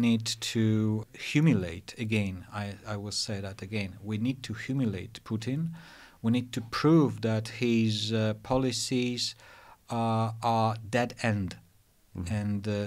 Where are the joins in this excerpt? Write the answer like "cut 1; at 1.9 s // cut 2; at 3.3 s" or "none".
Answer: cut 1; at 1.1 s

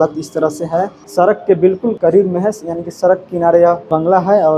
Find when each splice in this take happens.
cut 1; at 1.0 s // cut 2; at 2.0 s // cut 3; at 3.8 s

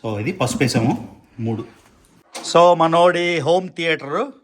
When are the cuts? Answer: cut 1; at 2.1 s

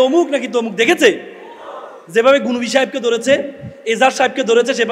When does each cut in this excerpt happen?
none

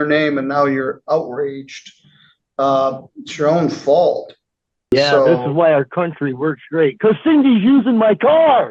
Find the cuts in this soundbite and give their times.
cut 1; at 4.9 s

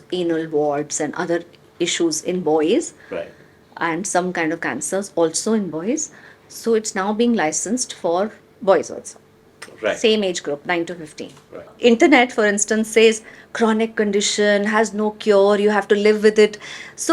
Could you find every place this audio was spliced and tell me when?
cut 1; at 11.7 s

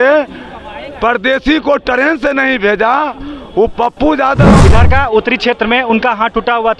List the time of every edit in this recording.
cut 1; at 4.6 s

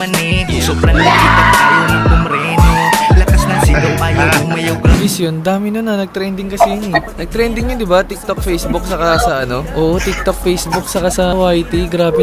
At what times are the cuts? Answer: cut 1; at 5.0 s

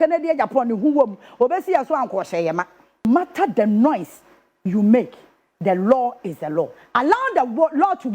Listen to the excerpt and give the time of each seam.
cut 1; at 3.0 s

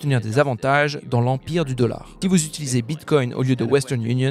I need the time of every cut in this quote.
cut 1; at 2.1 s

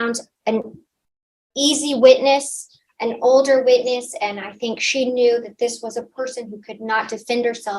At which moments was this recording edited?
none

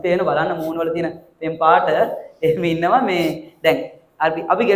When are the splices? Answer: none

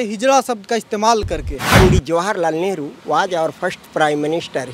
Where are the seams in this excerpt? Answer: cut 1; at 1.8 s

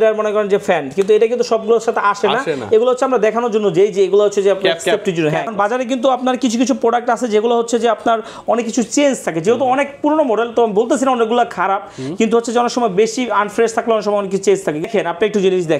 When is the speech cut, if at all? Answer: cut 1; at 5.5 s // cut 2; at 14.9 s

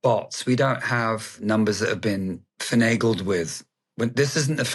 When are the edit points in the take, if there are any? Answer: cut 1; at 1.4 s // cut 2; at 2.5 s

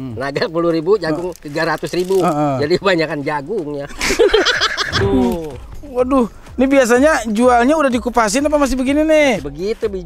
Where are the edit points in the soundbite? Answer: cut 1; at 5.0 s

